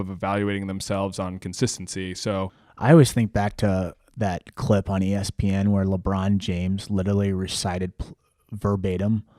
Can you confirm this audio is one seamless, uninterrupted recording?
no; 1 cut; at 2.6 s

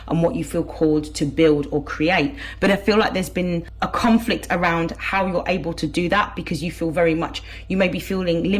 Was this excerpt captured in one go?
no; 1 cut; at 3.7 s

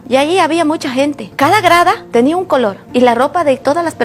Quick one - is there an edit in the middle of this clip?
no; 0 cuts

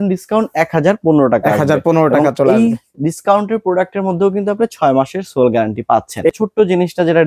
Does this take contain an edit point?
yes; 1 cut; at 6.3 s

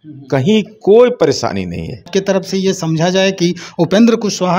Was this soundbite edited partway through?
yes; 1 cut; at 2.1 s

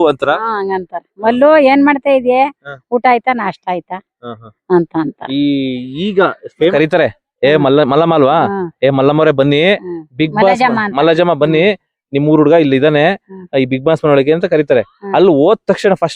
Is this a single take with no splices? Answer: no; 1 cut; at 6.7 s

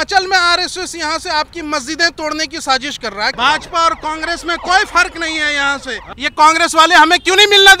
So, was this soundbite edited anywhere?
yes; 2 cuts; at 3.3 s, 6.0 s

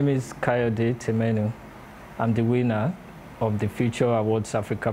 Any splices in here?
no; 0 cuts

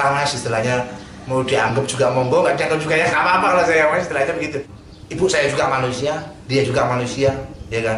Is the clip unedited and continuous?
no; 1 cut; at 4.7 s

